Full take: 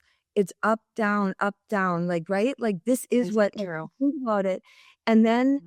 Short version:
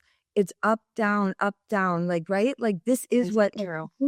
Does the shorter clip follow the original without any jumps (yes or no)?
yes